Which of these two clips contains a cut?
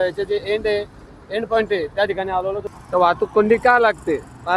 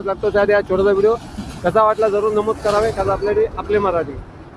first; 1 cut; at 2.6 s

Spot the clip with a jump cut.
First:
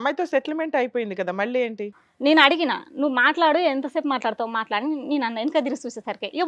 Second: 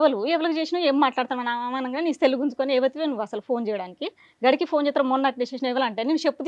first; 1 cut; at 2.0 s

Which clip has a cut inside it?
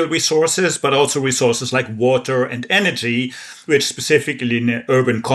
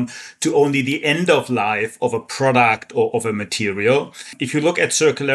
second; 1 cut; at 4.4 s

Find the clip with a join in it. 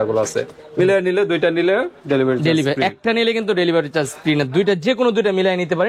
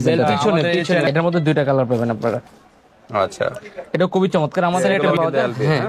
second; 2 cuts; at 1.1 s, 4.8 s

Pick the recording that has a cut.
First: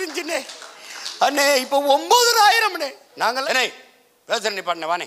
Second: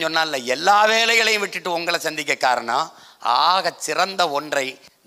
first; 1 cut; at 3.4 s

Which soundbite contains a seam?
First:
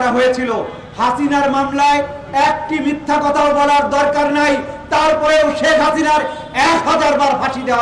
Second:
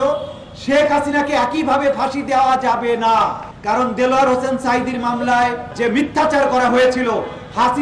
second; 2 cuts; at 3.5 s, 5.7 s

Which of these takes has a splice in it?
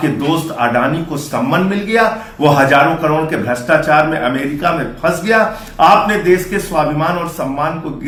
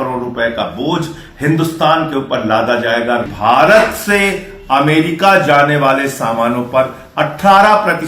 second; 1 cut; at 3.3 s

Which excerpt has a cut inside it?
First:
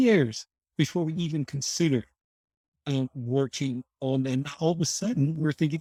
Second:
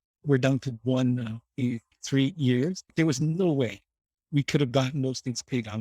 second; 2 cuts; at 1.9 s, 2.9 s

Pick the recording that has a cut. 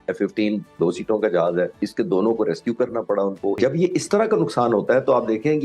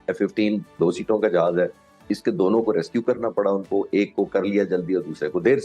first; 2 cuts; at 1.8 s, 3.6 s

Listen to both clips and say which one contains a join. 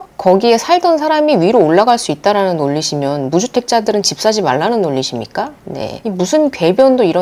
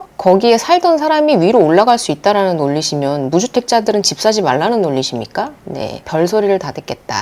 second; 1 cut; at 6.0 s

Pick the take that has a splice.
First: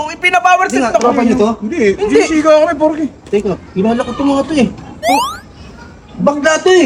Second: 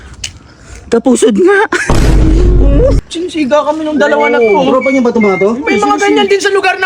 second; 1 cut; at 3.0 s

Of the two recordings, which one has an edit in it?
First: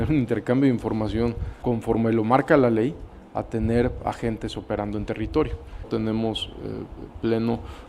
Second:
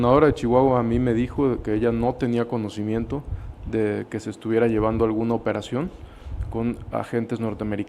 first; 2 cuts; at 1.5 s, 5.9 s

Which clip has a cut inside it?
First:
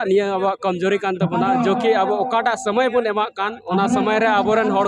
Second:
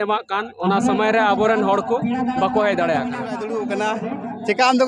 second; 1 cut; at 3.5 s

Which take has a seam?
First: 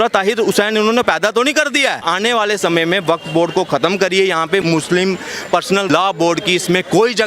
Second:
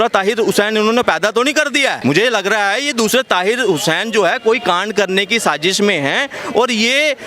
first; 3 cuts; at 2.0 s, 4.6 s, 5.9 s

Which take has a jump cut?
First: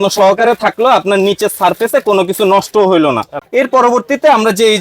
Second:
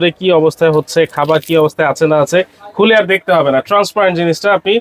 first; 1 cut; at 3.3 s

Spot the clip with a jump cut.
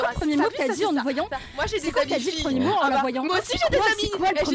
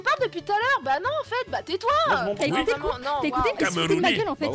second; 1 cut; at 2.4 s

